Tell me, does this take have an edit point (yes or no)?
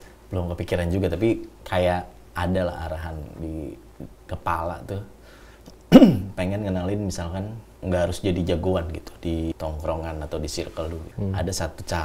yes